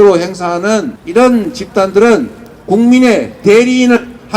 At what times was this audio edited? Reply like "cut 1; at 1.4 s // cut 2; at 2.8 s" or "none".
cut 1; at 1.0 s